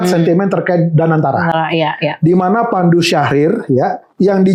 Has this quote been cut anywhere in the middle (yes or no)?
no